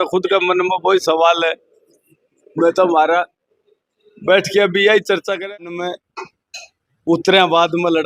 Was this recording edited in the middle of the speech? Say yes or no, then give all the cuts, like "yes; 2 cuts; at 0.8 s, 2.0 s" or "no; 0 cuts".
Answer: yes; 1 cut; at 5.4 s